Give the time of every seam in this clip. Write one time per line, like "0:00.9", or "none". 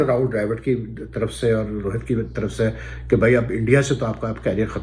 none